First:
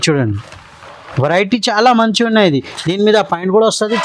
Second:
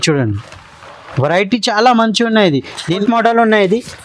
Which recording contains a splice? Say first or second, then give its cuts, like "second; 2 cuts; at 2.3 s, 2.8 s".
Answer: second; 1 cut; at 2.9 s